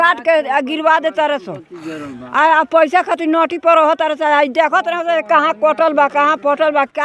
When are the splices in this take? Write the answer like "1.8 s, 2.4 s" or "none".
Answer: none